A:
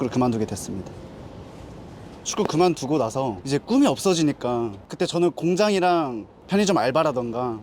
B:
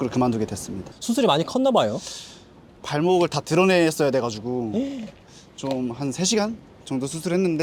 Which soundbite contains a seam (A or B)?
A